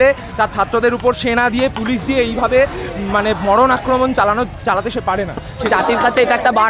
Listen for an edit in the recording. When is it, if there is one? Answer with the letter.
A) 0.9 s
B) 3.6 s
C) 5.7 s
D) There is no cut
C